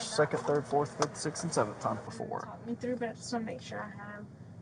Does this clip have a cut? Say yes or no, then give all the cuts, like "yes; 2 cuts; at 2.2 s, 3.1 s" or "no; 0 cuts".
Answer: yes; 1 cut; at 2.1 s